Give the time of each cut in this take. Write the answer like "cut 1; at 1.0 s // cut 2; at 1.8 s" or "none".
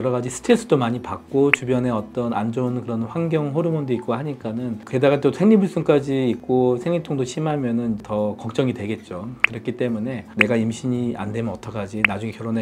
none

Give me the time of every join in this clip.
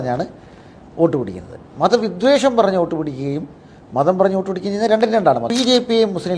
cut 1; at 5.5 s

